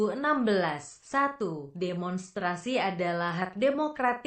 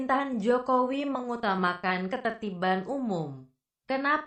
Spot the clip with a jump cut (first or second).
first